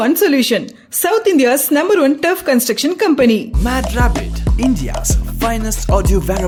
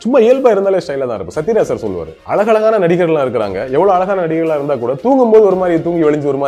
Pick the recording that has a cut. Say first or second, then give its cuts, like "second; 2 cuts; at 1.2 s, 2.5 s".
second; 1 cut; at 2.1 s